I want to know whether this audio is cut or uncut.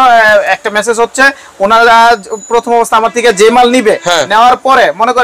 uncut